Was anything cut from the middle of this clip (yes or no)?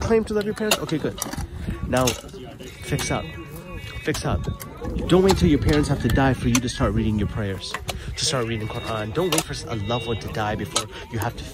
no